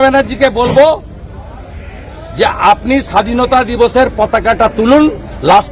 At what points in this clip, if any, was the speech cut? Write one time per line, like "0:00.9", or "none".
none